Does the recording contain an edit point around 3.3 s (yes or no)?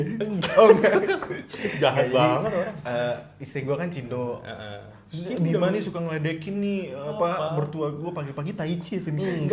no